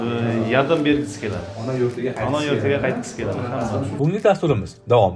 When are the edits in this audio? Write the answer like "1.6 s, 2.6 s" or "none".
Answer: 3.9 s